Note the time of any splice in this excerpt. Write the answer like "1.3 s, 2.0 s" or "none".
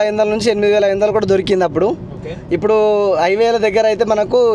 none